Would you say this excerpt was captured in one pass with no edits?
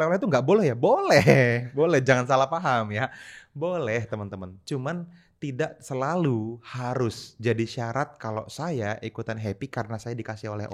yes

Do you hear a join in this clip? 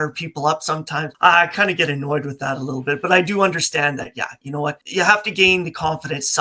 yes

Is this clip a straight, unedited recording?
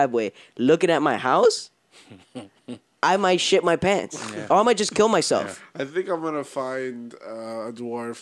yes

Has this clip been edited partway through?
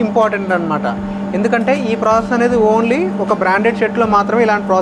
no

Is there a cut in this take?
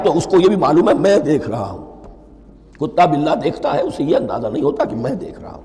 no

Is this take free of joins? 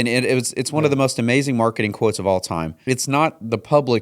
no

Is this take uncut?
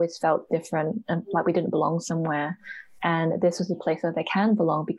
yes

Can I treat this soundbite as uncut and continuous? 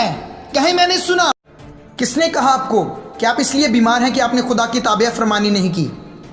no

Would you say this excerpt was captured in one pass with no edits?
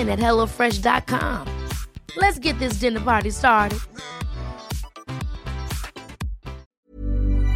no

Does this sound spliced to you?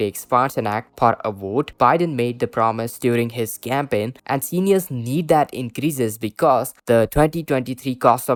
no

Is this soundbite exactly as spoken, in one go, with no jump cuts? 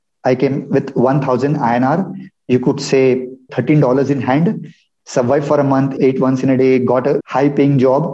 no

